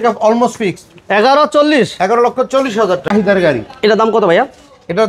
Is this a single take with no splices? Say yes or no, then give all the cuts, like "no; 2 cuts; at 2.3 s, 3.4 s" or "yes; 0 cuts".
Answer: no; 1 cut; at 3.1 s